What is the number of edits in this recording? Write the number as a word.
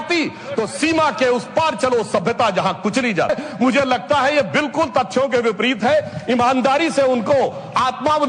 one